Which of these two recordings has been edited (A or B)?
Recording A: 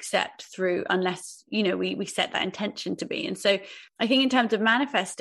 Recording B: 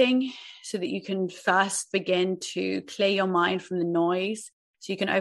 A